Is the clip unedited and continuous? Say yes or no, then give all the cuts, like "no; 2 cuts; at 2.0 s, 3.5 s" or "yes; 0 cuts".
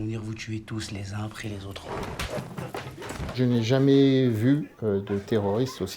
no; 2 cuts; at 1.8 s, 3.3 s